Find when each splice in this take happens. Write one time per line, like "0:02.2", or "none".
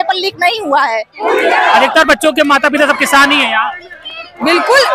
0:01.1

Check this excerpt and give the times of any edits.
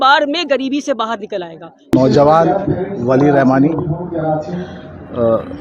0:01.9

